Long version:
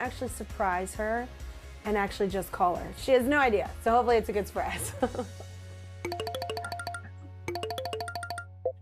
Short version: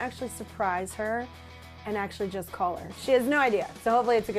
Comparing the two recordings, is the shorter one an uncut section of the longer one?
yes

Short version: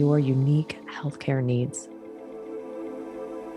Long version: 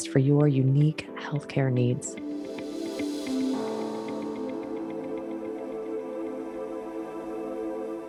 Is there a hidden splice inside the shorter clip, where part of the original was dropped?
yes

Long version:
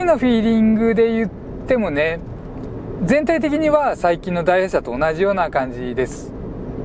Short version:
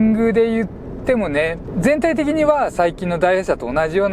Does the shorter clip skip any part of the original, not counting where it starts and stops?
yes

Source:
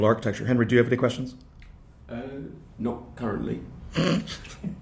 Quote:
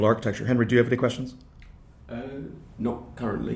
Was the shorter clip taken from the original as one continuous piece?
yes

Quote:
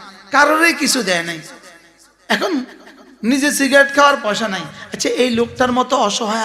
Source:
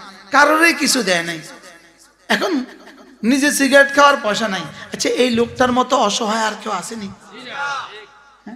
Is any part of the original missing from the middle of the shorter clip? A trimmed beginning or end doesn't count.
no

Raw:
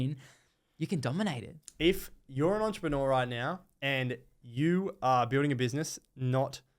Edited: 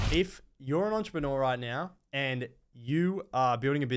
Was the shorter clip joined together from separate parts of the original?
no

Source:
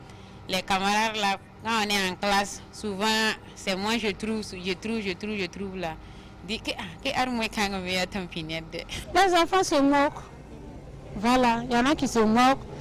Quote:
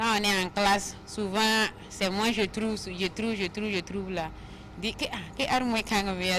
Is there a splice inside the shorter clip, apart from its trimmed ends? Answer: no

